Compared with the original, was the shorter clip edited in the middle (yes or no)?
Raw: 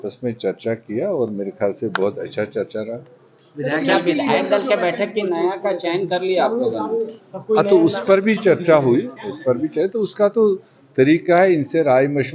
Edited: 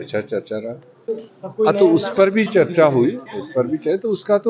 yes